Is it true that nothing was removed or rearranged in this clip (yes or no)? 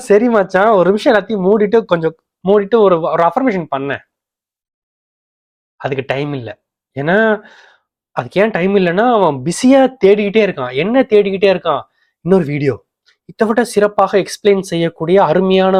yes